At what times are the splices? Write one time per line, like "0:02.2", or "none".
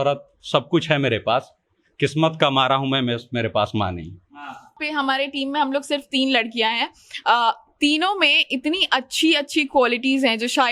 0:04.8